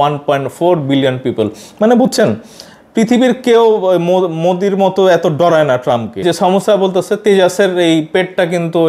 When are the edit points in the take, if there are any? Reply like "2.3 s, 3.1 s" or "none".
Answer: 6.2 s